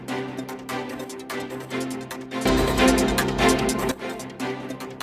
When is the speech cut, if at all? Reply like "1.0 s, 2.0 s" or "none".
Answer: 2.4 s, 3.9 s